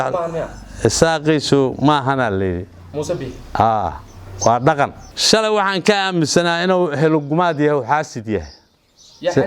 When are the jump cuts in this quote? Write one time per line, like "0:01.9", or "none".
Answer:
0:05.0

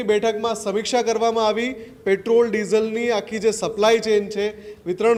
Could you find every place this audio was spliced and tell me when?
none

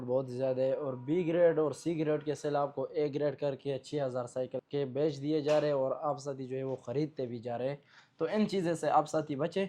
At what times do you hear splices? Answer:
0:04.6

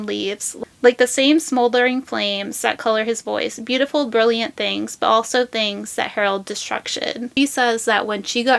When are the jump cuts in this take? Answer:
0:07.2

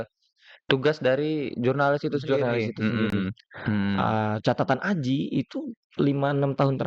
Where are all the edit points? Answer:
0:03.4

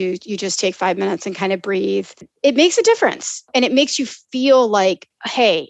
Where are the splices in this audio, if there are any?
0:02.3
0:03.5

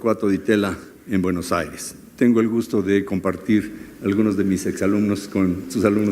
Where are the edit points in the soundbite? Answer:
0:03.1

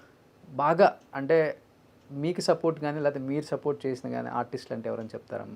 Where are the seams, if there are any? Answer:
none

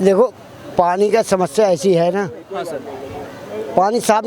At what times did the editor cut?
none

